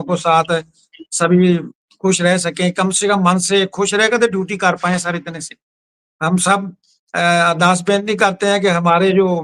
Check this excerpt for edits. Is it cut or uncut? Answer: uncut